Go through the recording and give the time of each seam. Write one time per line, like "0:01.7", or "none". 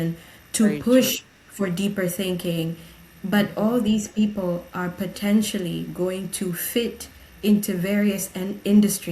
none